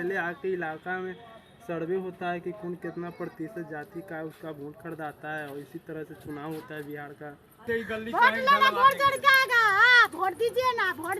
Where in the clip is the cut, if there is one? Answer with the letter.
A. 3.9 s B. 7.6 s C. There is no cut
B